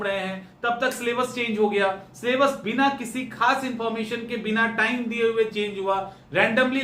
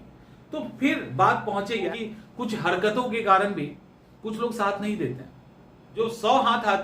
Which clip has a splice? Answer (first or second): second